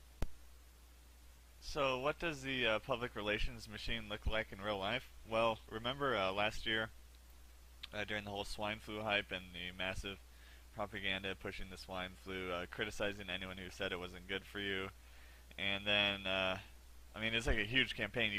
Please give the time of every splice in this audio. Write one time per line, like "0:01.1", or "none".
none